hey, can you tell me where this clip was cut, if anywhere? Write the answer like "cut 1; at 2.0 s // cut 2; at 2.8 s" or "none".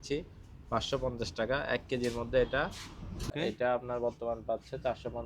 cut 1; at 3.3 s